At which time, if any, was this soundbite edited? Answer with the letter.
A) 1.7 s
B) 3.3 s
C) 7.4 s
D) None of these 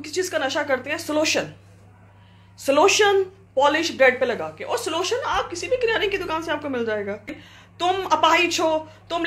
C